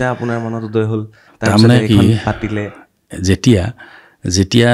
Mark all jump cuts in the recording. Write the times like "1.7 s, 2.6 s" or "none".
none